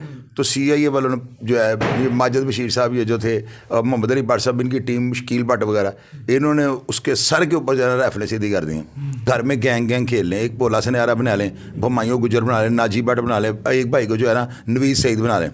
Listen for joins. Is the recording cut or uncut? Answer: cut